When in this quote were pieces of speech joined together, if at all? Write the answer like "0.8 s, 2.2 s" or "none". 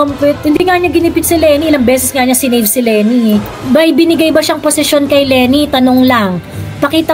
3.5 s